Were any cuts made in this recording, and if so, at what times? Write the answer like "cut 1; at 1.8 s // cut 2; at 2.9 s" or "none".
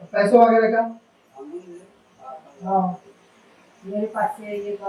none